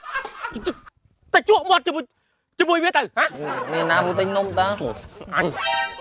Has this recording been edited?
no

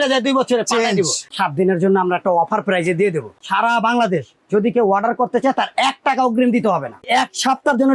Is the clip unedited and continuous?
no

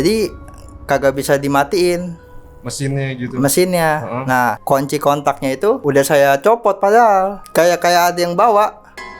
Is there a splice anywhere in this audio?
yes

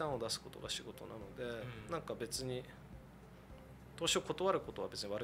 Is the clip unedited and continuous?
yes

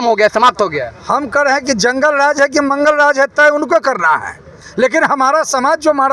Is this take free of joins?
yes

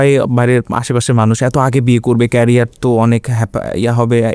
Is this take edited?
no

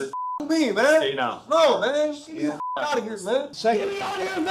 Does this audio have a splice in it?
yes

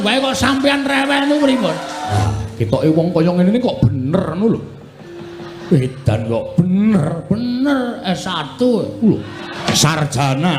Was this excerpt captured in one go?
no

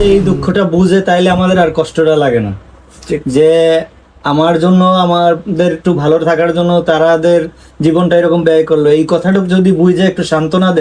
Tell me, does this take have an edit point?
no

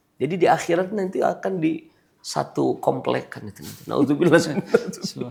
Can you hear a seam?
no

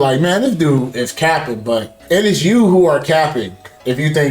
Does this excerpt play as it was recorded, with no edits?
no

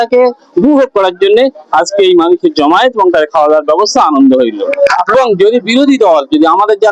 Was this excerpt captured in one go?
no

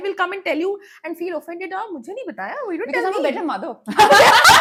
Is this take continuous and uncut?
yes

